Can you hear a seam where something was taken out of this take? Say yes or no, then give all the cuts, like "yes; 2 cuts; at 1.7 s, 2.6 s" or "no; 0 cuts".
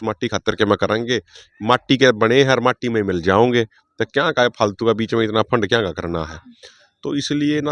no; 0 cuts